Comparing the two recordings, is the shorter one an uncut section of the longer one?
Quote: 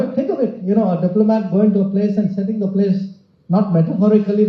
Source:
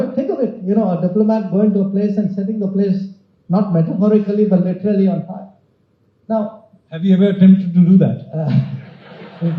yes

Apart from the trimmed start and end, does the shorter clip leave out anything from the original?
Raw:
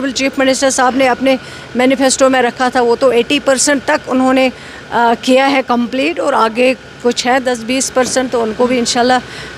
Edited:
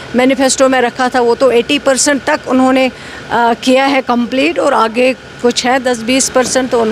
no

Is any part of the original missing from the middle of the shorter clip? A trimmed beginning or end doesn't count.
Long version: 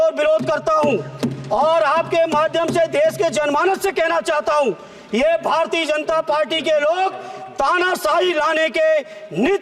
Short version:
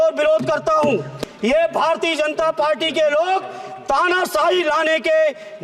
yes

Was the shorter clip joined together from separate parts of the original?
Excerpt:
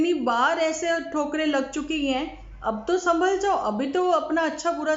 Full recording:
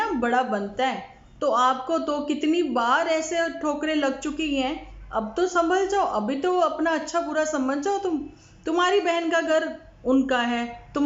no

